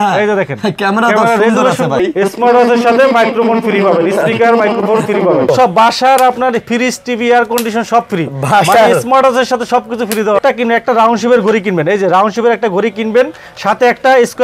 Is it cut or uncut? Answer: cut